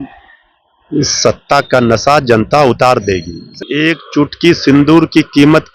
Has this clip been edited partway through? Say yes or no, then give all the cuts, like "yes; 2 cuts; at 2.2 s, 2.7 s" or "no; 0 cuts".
yes; 1 cut; at 3.6 s